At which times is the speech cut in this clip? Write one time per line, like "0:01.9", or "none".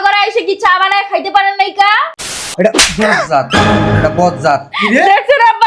0:02.5

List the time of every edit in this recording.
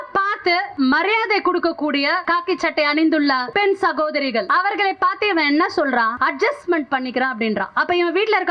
0:00.7
0:02.2
0:03.5
0:04.5
0:06.1

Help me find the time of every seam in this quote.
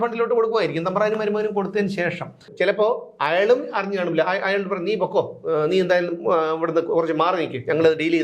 0:02.5

